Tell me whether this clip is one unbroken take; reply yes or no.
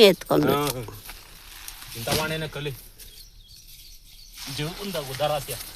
yes